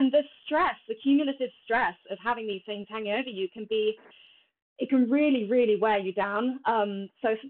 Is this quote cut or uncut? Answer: uncut